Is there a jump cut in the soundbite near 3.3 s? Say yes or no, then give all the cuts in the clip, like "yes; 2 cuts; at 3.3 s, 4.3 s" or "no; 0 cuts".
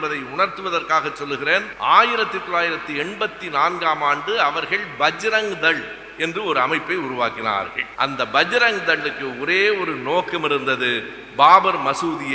no; 2 cuts; at 1.7 s, 7.8 s